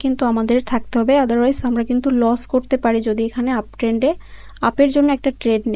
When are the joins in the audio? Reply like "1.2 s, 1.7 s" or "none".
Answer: none